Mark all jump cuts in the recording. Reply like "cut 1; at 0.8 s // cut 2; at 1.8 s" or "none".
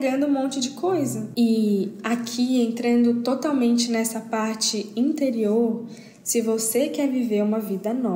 none